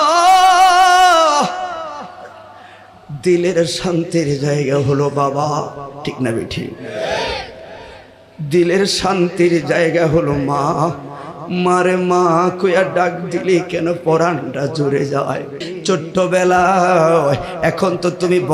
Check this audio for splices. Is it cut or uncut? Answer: cut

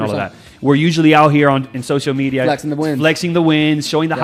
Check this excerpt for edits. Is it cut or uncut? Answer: uncut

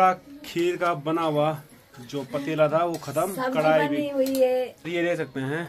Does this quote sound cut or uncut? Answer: uncut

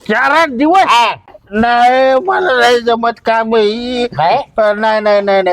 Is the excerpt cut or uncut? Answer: cut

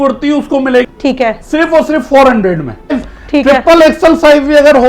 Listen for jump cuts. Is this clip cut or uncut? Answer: cut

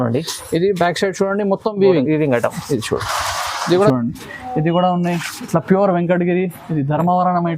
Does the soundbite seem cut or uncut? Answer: cut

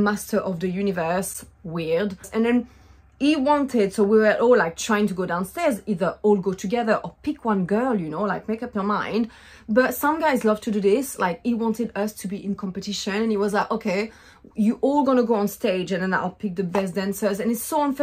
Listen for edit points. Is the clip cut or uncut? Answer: uncut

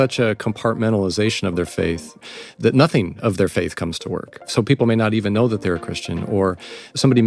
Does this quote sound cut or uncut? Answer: cut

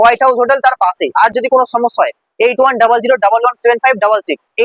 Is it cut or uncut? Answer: uncut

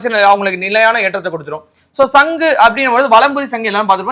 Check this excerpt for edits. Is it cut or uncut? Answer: uncut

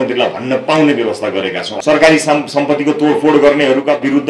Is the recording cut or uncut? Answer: cut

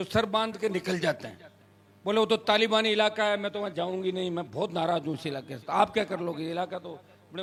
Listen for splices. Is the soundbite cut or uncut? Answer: uncut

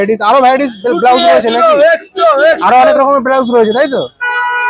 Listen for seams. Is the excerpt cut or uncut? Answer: uncut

